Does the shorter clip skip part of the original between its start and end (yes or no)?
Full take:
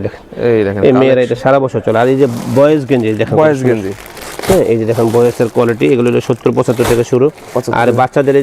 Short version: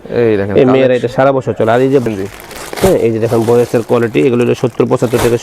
yes